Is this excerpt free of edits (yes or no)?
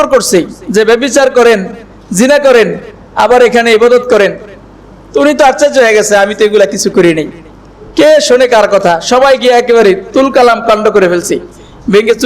yes